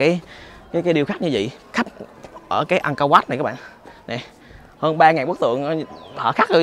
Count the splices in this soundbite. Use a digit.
0